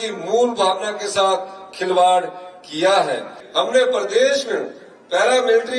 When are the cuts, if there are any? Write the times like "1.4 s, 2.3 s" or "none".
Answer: 3.4 s